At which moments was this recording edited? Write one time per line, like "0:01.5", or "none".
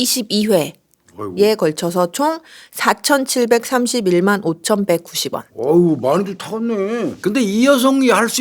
none